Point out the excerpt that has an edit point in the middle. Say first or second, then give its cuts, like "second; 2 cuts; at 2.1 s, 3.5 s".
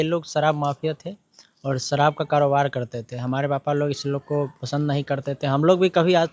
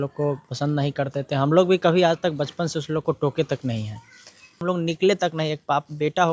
second; 1 cut; at 4.6 s